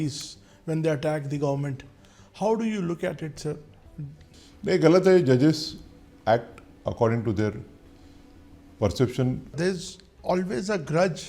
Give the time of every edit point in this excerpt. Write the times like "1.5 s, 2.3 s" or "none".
9.5 s